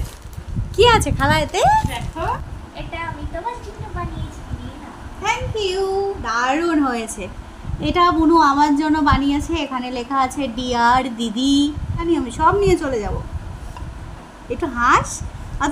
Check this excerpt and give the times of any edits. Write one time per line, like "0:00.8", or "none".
0:02.6
0:12.1

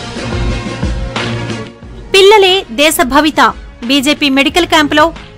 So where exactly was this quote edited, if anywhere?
0:01.5

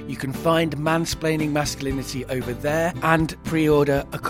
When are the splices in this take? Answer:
0:03.2

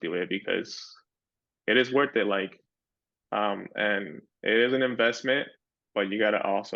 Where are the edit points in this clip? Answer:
none

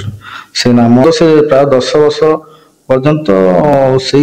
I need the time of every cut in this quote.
0:01.0

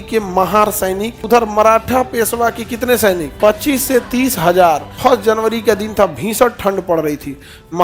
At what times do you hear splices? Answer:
0:01.2
0:03.3
0:04.9

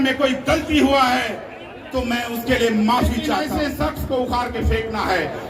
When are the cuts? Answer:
0:03.4

